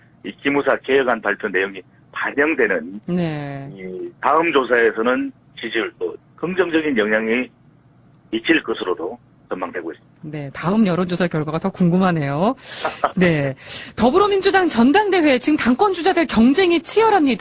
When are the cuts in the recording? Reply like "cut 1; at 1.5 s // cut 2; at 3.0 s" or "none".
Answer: cut 1; at 7.5 s

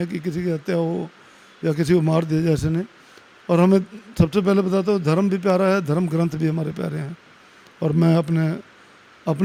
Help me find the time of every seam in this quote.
none

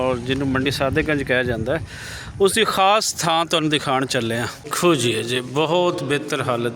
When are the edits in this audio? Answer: cut 1; at 4.7 s

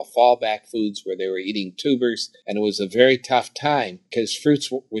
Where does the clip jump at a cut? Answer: cut 1; at 2.3 s // cut 2; at 4.0 s

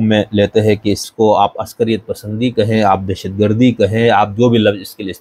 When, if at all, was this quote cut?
cut 1; at 1.0 s

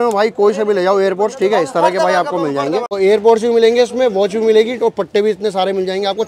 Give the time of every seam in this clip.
cut 1; at 2.9 s

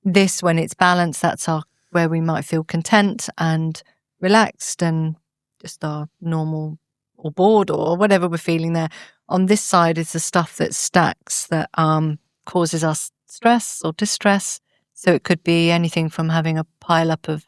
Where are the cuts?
cut 1; at 12.4 s

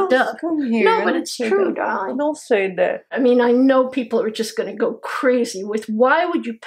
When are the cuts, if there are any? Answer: cut 1; at 3.0 s

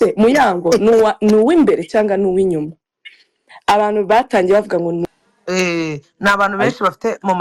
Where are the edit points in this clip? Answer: cut 1; at 5.0 s

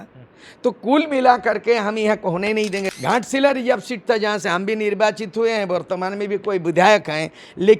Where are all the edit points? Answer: cut 1; at 2.9 s

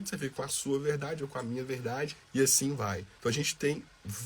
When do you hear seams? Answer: cut 1; at 2.2 s // cut 2; at 3.1 s

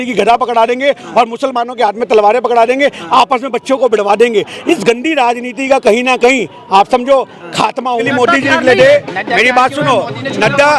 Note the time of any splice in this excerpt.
cut 1; at 8.0 s

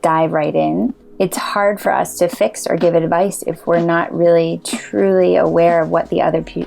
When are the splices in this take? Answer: cut 1; at 1.0 s

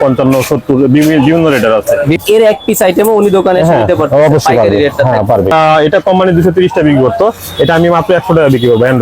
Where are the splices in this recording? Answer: cut 1; at 2.2 s // cut 2; at 5.5 s

